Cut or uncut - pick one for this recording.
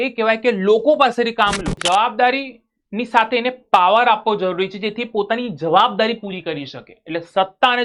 cut